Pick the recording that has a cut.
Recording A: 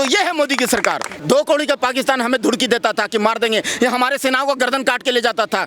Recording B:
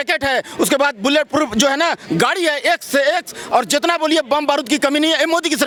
A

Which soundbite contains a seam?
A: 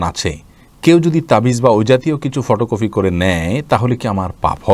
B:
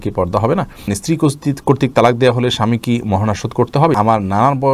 B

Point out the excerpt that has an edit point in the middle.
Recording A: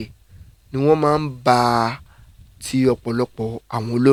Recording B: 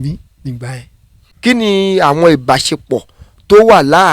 B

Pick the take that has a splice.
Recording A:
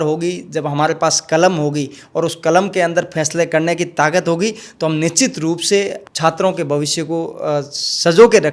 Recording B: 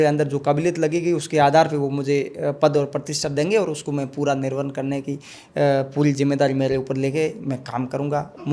A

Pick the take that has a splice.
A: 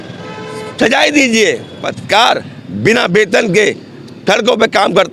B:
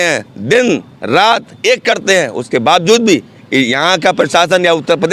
A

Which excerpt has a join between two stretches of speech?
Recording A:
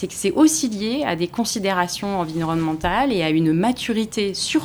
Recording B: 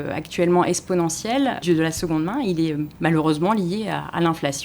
B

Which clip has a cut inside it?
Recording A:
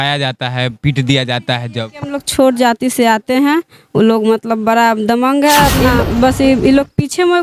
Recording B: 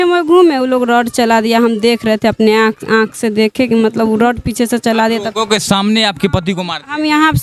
A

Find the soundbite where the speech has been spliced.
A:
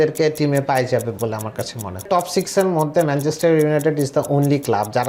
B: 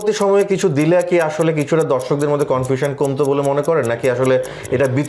A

